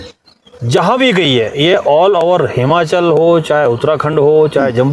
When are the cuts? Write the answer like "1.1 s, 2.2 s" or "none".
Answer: none